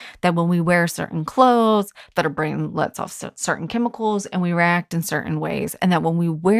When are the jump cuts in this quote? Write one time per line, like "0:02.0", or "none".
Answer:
none